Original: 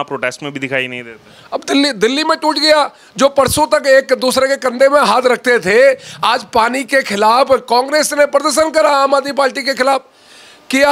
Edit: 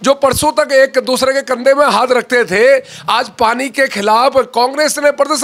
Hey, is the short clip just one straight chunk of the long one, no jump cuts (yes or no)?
yes